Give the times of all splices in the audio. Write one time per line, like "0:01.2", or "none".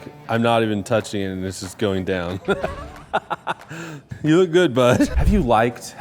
0:04.1
0:05.2